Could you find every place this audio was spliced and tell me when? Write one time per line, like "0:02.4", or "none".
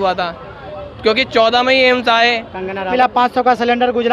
0:02.9

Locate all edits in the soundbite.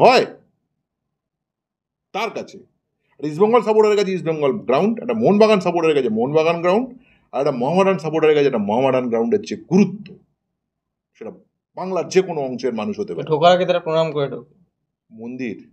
none

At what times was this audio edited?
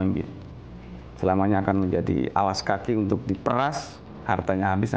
none

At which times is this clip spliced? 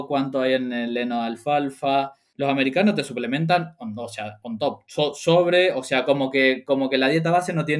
0:02.2

